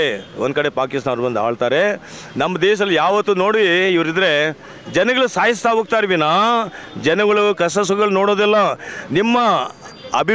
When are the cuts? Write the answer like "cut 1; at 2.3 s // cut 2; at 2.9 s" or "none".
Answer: cut 1; at 8.9 s